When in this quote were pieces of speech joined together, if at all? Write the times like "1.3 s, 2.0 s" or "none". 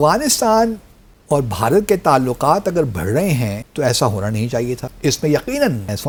none